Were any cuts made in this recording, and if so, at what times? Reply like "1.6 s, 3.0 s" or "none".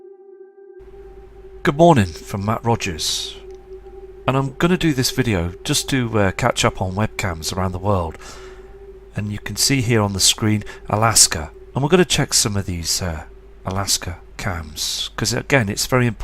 8.2 s